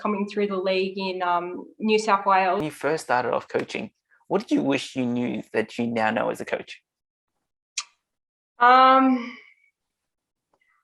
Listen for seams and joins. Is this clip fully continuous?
no; 1 cut; at 2.6 s

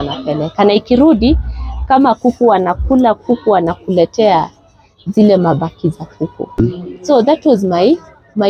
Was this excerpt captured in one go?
no; 1 cut; at 6.6 s

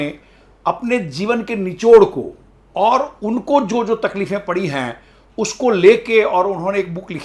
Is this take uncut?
yes; 0 cuts

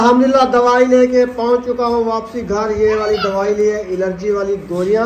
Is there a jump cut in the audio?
no; 0 cuts

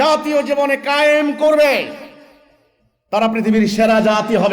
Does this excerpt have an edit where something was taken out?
no; 0 cuts

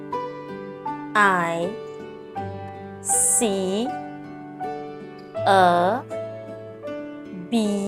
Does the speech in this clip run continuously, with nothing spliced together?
no; 2 cuts; at 2.3 s, 3.4 s

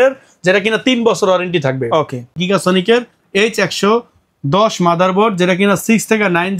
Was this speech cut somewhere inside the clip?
yes; 1 cut; at 2.4 s

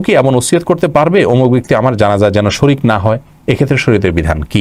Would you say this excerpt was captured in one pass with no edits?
yes; 0 cuts

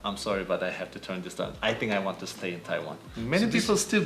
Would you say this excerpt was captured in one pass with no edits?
no; 1 cut; at 3.1 s

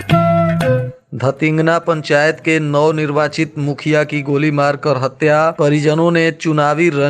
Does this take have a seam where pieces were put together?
yes; 1 cut; at 0.9 s

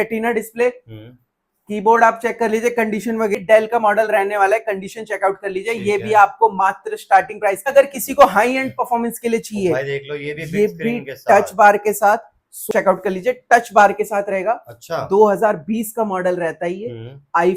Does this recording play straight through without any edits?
no; 3 cuts; at 3.4 s, 7.7 s, 12.7 s

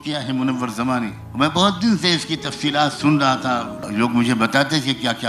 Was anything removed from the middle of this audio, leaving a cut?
yes; 2 cuts; at 1.2 s, 3.7 s

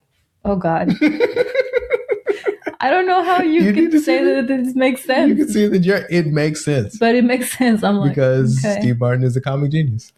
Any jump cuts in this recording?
no; 0 cuts

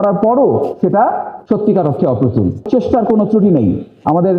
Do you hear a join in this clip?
yes; 2 cuts; at 1.3 s, 2.7 s

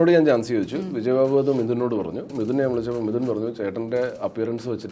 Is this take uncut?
no; 1 cut; at 2.3 s

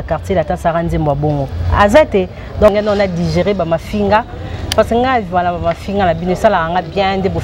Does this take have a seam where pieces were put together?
yes; 1 cut; at 2.7 s

